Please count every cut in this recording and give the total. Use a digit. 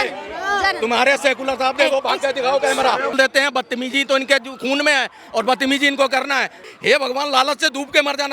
2